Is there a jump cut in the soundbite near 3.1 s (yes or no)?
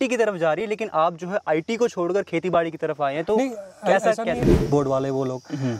no